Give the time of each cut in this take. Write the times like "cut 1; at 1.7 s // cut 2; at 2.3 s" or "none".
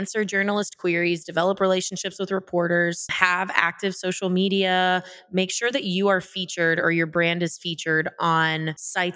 none